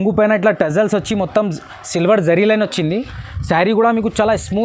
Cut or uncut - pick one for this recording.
uncut